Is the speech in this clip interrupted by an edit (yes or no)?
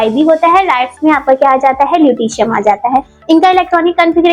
no